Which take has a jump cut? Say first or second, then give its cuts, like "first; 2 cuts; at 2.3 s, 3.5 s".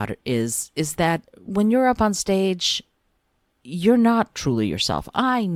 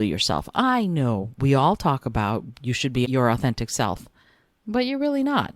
second; 1 cut; at 3.1 s